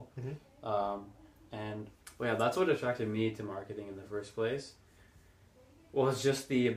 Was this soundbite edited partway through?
yes; 1 cut; at 1.9 s

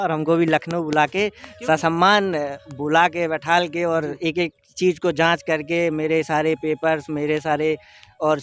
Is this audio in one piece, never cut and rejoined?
yes; 0 cuts

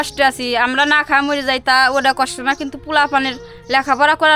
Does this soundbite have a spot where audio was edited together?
no; 0 cuts

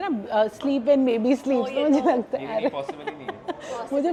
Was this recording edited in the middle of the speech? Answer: no; 0 cuts

